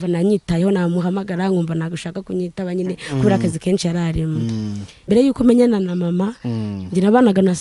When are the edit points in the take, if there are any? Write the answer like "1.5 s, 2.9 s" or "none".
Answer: 5.1 s

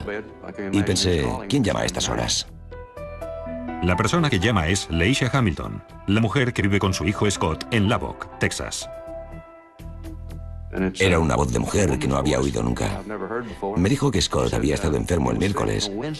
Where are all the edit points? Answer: 3.4 s

